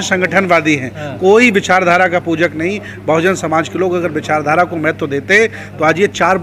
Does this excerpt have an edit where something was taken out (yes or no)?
no